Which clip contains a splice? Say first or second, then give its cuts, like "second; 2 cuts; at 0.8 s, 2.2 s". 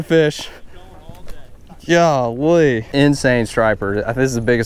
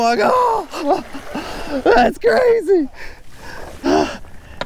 first; 1 cut; at 2.8 s